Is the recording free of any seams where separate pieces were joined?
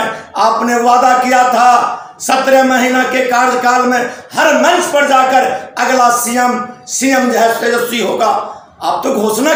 yes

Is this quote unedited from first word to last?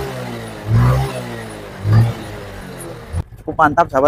no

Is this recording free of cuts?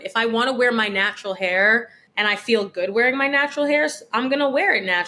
no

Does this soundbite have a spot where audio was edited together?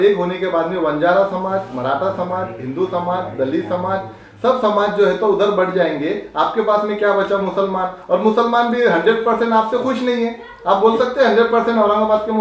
no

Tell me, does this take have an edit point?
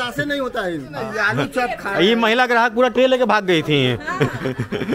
yes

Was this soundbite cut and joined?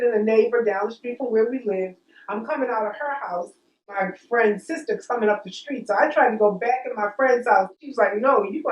yes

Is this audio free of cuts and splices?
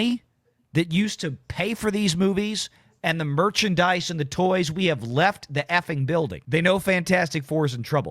no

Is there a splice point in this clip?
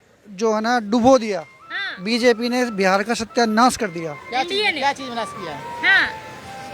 no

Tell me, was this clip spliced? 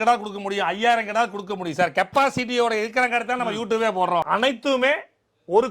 yes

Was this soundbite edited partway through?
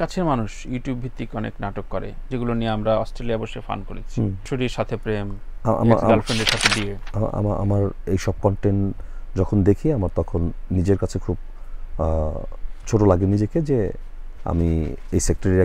yes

